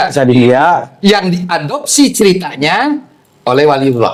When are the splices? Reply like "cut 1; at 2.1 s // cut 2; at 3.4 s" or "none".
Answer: none